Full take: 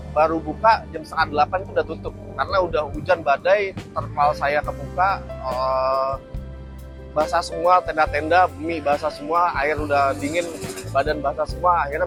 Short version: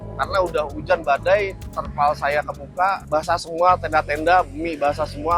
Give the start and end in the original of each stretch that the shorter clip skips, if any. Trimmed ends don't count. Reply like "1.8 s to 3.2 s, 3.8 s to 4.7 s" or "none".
5.2 s to 7.1 s